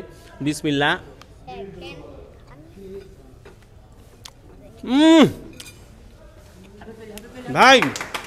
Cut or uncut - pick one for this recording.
uncut